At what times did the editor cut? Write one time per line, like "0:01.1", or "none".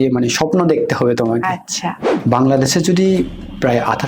0:02.0